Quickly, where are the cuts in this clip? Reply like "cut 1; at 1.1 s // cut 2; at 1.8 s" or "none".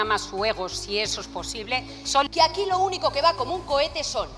cut 1; at 2.3 s